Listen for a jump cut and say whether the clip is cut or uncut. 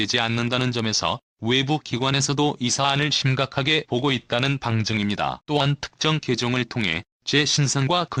uncut